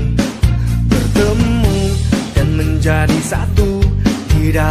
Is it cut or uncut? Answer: uncut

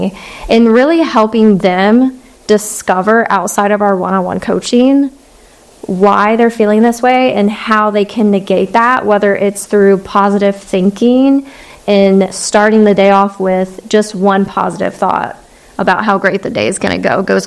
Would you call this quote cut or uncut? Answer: uncut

